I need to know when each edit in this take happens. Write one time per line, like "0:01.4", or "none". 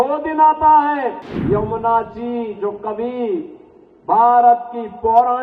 0:01.3